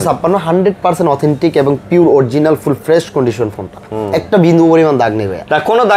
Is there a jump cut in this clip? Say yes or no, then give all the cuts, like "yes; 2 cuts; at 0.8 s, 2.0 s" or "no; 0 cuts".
no; 0 cuts